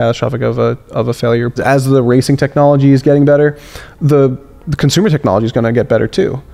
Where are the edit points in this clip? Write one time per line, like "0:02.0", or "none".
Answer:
0:01.6